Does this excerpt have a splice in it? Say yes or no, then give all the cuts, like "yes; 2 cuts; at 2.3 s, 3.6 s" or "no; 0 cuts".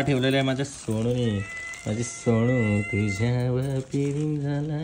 no; 0 cuts